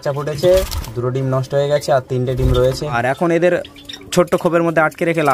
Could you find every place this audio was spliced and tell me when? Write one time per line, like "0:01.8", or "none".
0:03.0

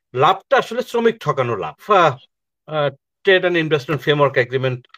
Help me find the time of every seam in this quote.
0:01.8

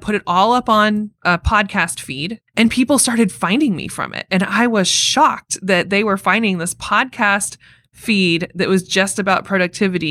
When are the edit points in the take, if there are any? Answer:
0:01.1
0:02.4

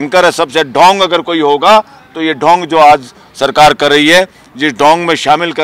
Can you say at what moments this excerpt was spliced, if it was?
none

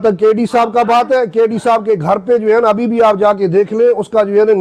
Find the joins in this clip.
none

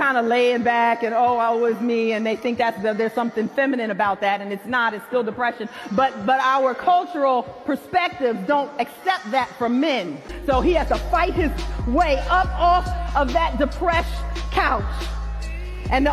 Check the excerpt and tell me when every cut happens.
0:10.3

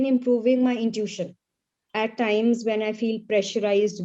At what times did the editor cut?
0:01.8

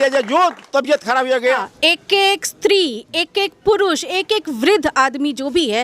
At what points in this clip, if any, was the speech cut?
0:01.4

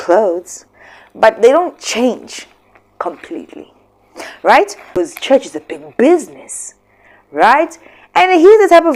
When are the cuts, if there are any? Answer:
0:04.8

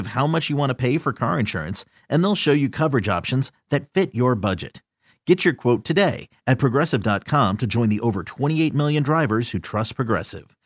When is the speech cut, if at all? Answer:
none

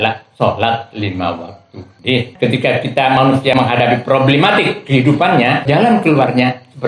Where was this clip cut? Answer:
0:02.3
0:03.5
0:05.7

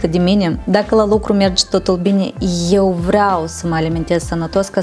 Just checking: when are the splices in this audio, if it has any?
none

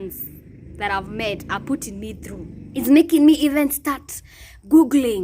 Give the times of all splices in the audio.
0:02.8

